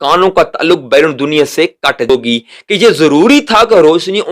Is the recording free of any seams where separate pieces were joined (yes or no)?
no